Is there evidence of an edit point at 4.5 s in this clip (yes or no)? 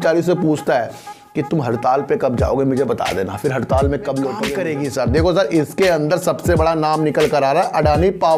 yes